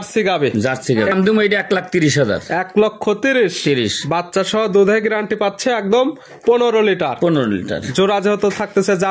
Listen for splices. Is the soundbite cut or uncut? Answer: cut